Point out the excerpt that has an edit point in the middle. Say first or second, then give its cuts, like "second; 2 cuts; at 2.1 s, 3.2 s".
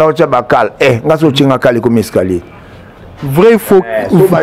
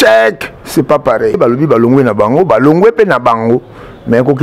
second; 1 cut; at 1.4 s